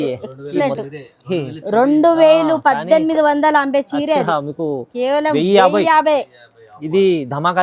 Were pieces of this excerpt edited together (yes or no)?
no